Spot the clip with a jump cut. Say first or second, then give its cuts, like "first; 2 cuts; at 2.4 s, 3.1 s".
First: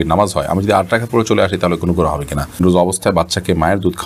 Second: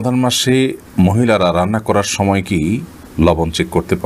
first; 1 cut; at 2.6 s